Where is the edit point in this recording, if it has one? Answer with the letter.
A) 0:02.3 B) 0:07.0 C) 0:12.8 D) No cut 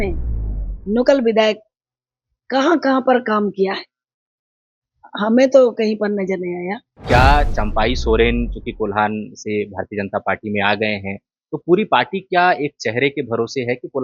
B